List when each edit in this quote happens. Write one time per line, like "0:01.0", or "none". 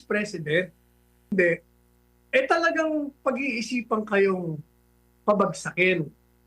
0:01.3